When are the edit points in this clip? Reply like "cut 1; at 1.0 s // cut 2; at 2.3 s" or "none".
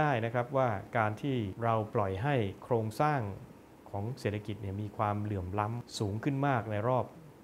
cut 1; at 1.5 s // cut 2; at 5.8 s